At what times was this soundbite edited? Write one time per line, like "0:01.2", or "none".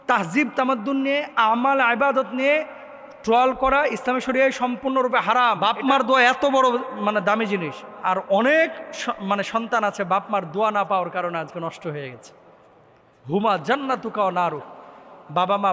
0:05.6